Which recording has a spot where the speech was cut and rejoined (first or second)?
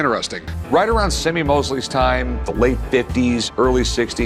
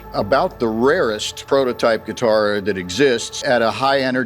second